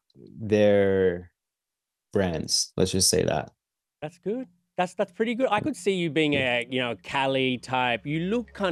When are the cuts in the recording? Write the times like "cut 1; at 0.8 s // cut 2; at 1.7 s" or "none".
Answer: none